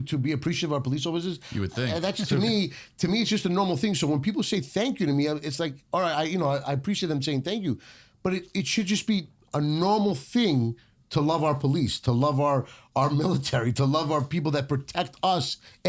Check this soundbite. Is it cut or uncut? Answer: uncut